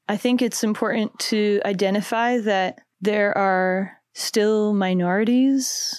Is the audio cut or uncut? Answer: uncut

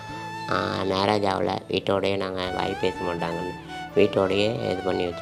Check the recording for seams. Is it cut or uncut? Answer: uncut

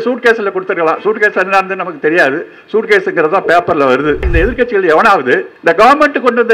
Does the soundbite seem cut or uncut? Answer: cut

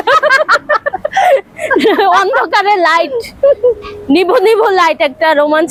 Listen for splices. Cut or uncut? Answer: uncut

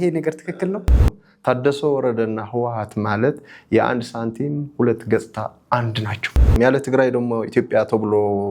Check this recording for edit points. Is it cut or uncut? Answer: cut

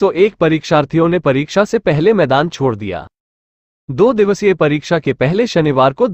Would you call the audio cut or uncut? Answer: cut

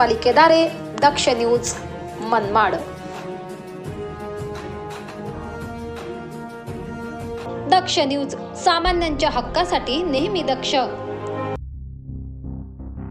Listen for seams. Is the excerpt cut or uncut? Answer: cut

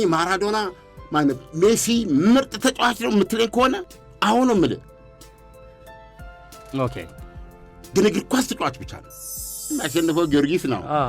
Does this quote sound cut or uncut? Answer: cut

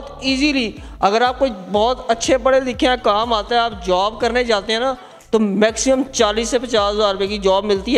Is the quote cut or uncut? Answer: uncut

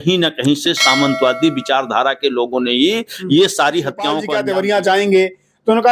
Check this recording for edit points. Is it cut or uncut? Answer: cut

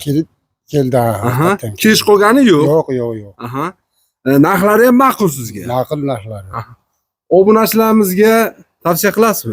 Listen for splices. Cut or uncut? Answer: uncut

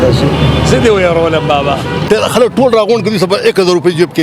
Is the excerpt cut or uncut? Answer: cut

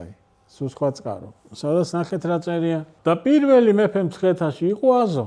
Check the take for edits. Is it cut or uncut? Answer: cut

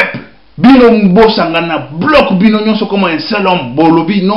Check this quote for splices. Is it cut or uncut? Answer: uncut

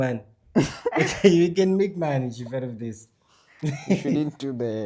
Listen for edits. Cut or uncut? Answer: uncut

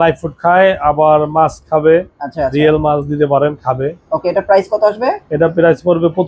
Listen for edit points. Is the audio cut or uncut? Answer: uncut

